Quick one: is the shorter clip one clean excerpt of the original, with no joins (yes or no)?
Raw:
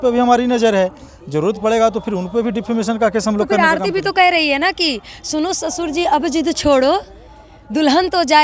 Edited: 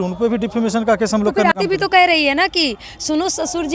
no